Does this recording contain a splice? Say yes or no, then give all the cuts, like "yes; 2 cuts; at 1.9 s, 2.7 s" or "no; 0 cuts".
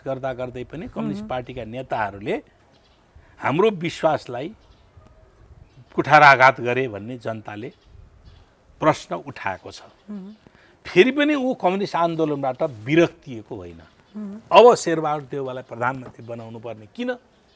no; 0 cuts